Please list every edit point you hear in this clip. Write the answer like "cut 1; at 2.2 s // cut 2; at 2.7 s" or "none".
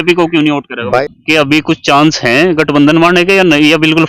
cut 1; at 1.0 s